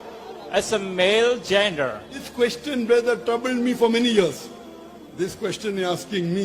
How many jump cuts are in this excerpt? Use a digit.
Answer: 1